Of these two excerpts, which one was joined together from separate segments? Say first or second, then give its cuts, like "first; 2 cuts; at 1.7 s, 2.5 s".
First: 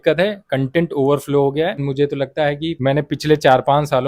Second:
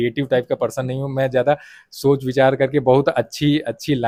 first; 2 cuts; at 1.9 s, 2.8 s